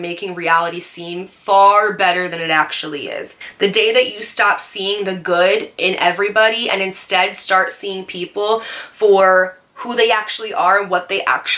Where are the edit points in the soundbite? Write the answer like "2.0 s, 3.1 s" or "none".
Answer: 3.3 s